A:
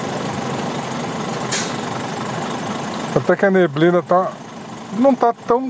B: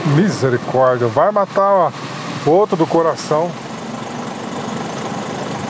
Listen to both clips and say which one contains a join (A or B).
B